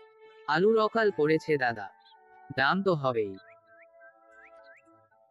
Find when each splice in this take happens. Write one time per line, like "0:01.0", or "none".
none

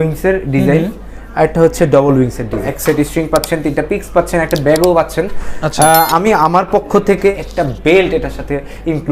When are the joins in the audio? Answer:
0:02.7
0:07.3

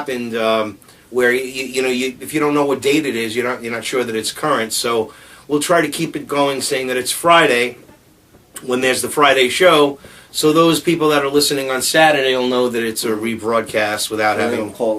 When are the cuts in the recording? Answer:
0:06.5

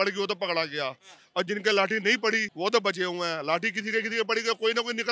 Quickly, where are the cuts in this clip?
0:02.5

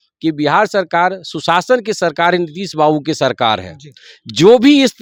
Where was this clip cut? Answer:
none

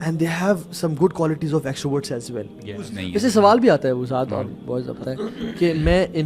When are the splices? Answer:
0:03.0

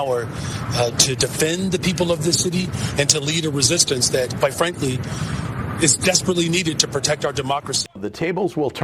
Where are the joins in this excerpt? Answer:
0:07.8

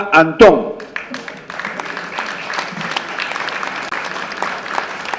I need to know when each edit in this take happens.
0:03.8

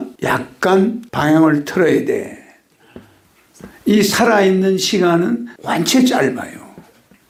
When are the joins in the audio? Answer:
none

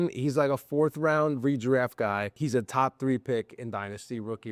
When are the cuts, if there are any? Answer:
0:02.3

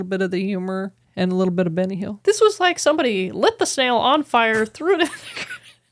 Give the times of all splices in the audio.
0:02.1

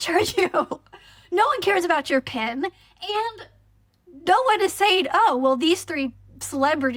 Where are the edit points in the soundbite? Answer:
none

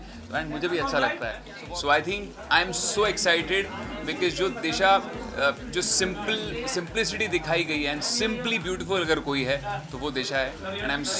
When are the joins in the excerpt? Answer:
0:01.5

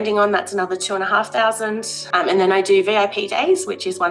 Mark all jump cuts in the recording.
0:01.9

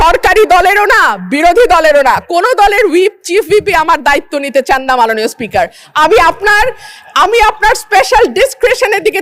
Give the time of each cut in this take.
none

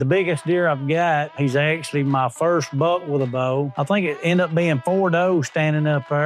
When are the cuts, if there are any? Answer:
0:01.3
0:03.7

